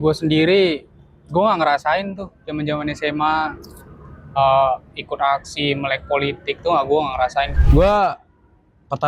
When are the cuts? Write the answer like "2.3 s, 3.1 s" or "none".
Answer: 7.5 s